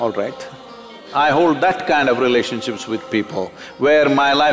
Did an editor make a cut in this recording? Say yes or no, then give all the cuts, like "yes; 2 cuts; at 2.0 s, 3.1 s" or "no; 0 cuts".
yes; 1 cut; at 1.0 s